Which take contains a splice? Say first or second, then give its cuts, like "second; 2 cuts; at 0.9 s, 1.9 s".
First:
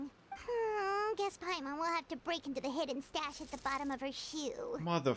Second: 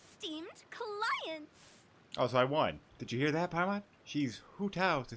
second; 2 cuts; at 2.9 s, 4.0 s